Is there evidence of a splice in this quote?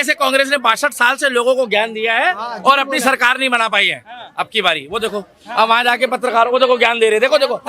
no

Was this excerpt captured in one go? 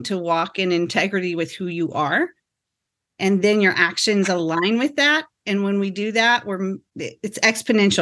no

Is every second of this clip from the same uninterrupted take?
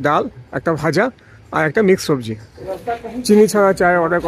no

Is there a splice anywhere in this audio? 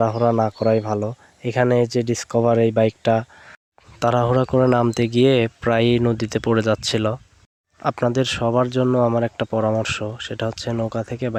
no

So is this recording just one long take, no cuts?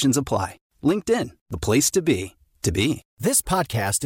no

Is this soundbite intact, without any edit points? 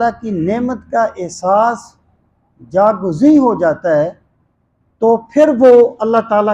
yes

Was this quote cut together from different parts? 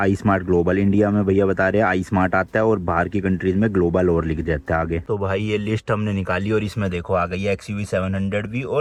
no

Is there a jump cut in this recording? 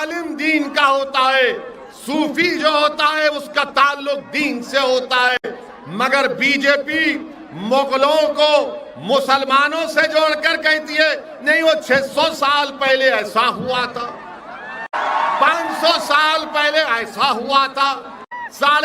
yes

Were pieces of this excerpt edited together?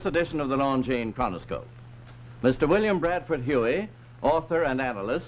no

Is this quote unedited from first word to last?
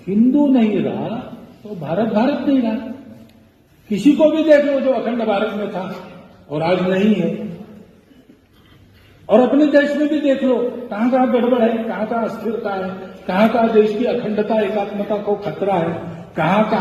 yes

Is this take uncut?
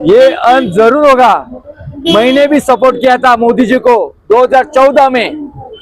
yes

